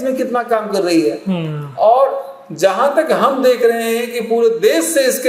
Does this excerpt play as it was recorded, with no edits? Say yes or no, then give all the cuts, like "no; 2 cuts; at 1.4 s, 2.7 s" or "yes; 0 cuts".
yes; 0 cuts